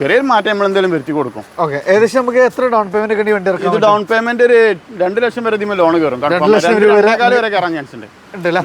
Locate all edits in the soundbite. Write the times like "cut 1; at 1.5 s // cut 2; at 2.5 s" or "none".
none